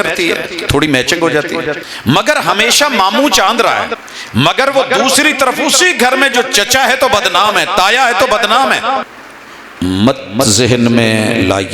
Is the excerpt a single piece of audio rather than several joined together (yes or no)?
no